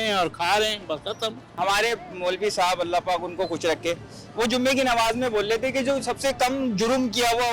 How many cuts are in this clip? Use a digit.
1